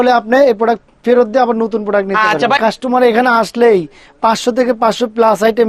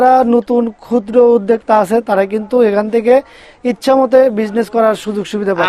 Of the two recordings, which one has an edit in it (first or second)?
first